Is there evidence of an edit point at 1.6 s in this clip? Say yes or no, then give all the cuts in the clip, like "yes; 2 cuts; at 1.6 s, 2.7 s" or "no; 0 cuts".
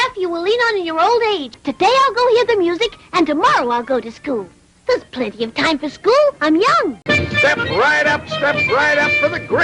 yes; 2 cuts; at 1.6 s, 7.0 s